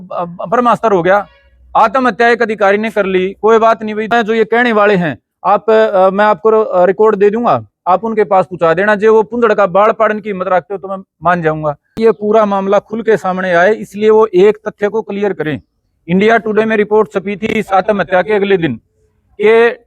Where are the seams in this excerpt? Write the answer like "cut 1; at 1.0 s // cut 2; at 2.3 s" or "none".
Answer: cut 1; at 4.1 s // cut 2; at 11.9 s

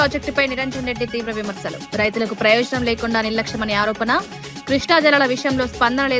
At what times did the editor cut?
none

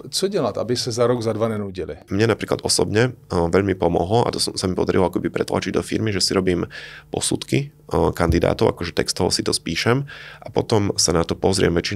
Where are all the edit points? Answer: cut 1; at 2.0 s

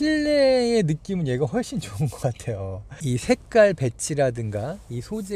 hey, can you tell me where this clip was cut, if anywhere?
none

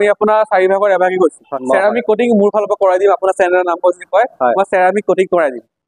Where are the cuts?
cut 1; at 1.4 s

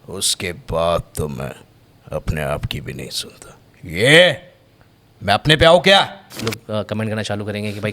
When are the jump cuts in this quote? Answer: cut 1; at 6.6 s

